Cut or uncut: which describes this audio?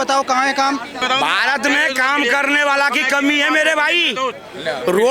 cut